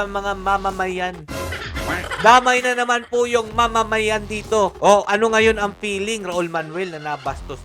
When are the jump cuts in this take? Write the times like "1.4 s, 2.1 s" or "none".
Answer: 4.8 s